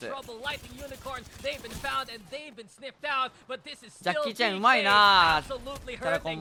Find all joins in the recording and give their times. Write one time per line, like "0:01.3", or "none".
none